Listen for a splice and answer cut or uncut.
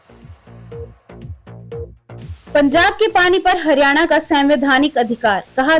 uncut